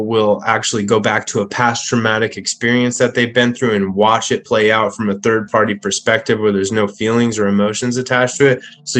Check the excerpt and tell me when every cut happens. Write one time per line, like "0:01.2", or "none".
none